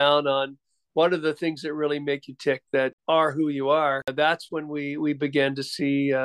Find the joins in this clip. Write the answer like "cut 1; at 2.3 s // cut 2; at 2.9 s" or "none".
cut 1; at 3.0 s // cut 2; at 4.1 s